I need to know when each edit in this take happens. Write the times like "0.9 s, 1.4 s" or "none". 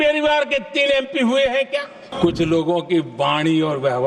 2.0 s